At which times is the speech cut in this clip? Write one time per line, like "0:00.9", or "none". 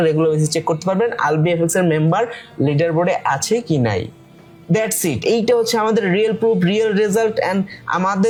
none